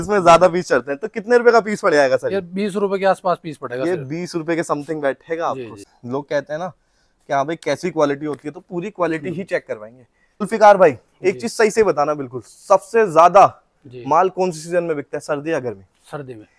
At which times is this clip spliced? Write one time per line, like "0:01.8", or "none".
0:05.7
0:10.4